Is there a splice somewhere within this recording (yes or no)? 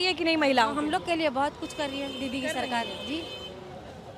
no